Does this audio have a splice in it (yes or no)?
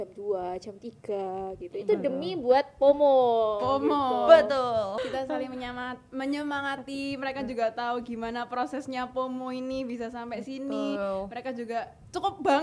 yes